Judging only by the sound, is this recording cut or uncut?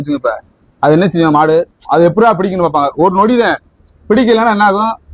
uncut